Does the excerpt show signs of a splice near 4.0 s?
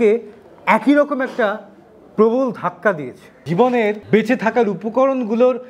yes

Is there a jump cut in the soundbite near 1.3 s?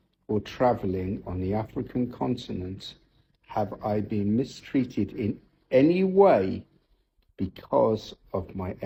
no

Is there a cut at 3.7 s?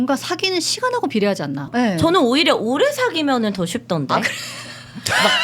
no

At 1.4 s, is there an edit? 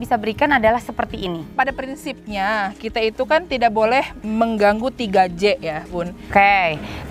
yes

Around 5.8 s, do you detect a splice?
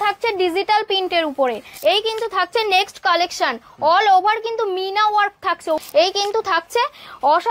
yes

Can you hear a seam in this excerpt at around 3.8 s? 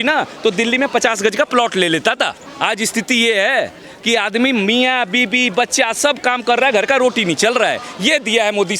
no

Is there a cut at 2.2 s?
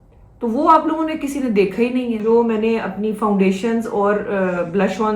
yes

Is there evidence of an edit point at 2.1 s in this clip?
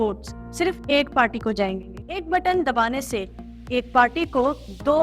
yes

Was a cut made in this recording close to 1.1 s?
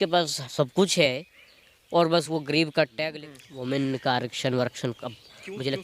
no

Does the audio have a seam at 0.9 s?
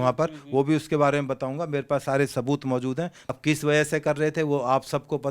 no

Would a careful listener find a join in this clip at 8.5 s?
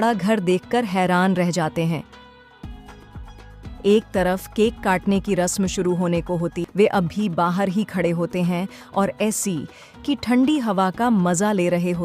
no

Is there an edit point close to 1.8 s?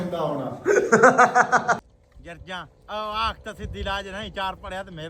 yes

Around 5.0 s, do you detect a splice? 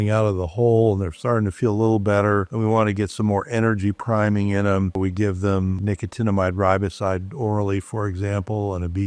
yes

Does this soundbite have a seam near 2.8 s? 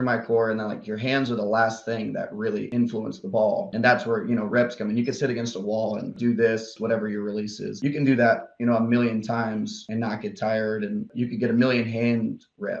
no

